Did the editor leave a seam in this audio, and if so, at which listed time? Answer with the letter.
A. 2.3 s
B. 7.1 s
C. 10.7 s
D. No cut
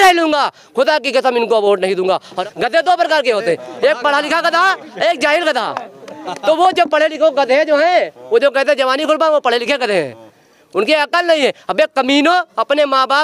A